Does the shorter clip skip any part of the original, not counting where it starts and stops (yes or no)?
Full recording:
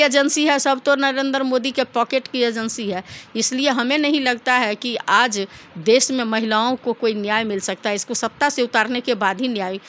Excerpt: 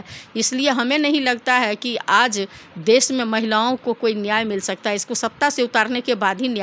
no